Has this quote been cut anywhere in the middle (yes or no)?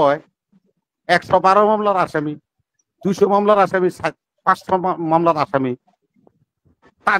no